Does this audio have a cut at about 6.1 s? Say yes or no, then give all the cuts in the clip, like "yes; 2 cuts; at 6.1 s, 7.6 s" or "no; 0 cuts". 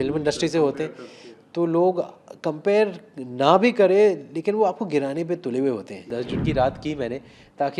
yes; 1 cut; at 6.1 s